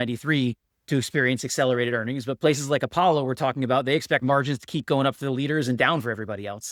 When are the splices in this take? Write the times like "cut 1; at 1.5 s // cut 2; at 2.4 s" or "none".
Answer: none